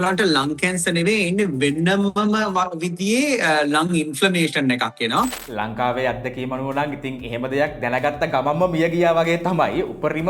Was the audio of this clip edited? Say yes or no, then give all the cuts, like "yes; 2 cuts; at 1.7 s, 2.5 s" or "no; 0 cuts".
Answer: yes; 1 cut; at 5.4 s